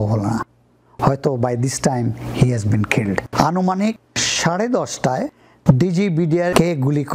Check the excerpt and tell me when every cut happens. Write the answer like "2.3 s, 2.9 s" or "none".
3.2 s